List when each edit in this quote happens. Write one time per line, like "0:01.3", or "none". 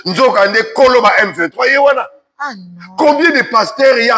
none